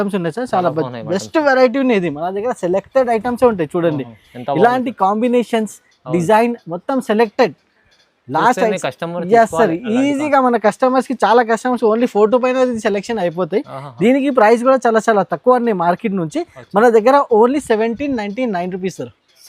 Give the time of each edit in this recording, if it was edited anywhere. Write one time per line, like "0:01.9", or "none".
none